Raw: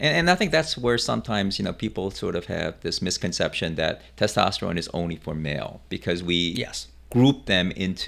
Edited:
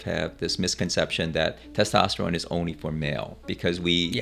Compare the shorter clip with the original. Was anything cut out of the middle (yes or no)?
no